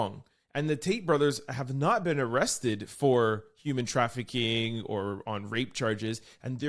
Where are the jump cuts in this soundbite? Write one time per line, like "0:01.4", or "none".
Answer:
none